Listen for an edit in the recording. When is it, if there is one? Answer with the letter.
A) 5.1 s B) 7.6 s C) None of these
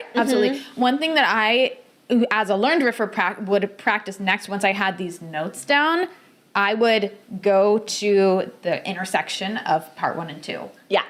C